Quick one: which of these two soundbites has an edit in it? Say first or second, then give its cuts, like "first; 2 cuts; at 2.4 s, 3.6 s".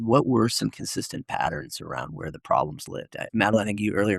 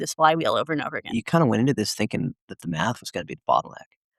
second; 1 cut; at 1.3 s